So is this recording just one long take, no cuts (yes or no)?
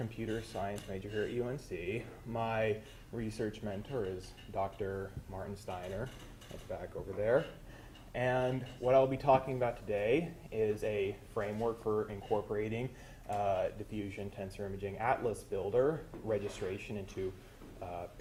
yes